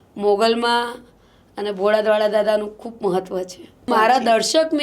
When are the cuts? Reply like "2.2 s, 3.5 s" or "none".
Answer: 3.9 s